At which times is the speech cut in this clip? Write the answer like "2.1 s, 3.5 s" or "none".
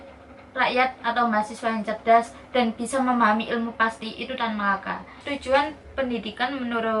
5.3 s